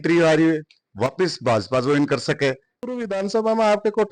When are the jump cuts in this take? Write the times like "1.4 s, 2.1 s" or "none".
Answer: 2.9 s

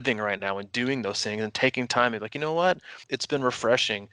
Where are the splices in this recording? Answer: 3.0 s

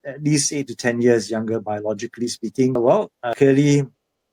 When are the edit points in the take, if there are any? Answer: 3.2 s

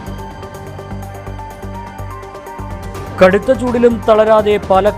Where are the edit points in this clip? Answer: 1.1 s

